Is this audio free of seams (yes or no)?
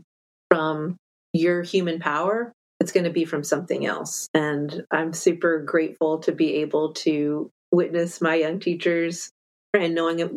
yes